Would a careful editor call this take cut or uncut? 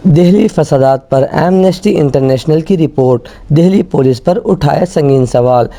uncut